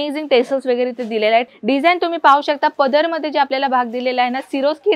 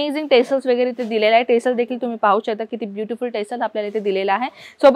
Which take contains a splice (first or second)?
first